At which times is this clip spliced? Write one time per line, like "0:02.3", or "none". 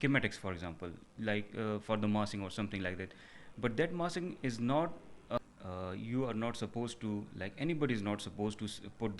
0:05.4